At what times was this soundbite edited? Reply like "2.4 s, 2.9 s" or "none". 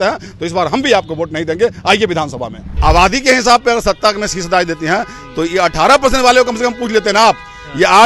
2.6 s